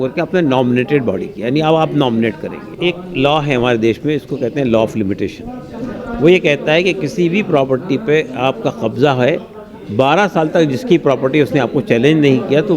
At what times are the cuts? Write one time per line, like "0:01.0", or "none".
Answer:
0:02.6